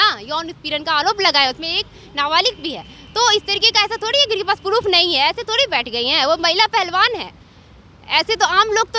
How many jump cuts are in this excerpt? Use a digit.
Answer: 0